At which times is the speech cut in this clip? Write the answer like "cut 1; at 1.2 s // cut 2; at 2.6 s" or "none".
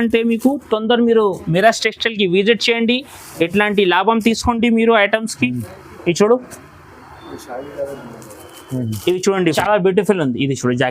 cut 1; at 9.5 s